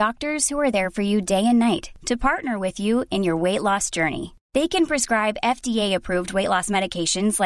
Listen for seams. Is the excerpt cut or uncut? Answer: uncut